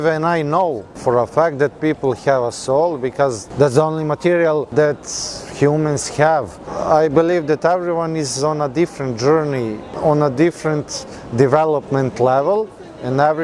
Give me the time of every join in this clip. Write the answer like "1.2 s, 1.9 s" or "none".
0.9 s, 3.4 s, 4.7 s, 6.7 s, 9.9 s